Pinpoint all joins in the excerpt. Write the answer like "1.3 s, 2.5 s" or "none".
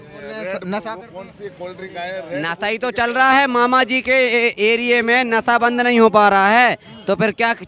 none